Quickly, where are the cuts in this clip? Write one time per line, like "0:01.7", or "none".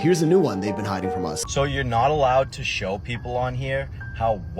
0:01.4